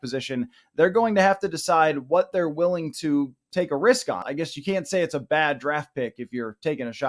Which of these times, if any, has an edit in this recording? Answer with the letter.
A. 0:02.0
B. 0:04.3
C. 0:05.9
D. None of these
B